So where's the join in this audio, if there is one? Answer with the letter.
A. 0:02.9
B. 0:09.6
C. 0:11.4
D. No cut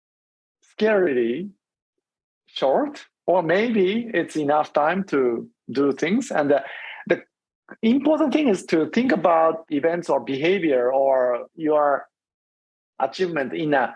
B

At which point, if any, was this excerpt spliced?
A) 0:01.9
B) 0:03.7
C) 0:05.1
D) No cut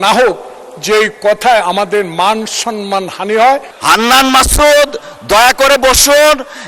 B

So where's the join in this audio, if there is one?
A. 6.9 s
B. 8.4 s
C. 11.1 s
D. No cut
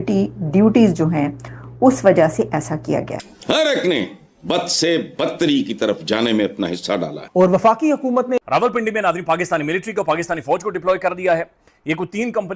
B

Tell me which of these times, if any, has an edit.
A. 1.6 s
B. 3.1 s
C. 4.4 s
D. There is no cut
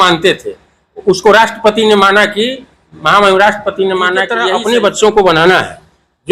C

